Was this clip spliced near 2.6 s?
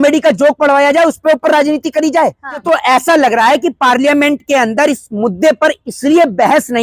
yes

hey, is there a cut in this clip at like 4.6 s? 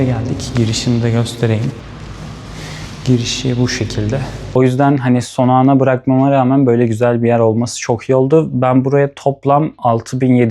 yes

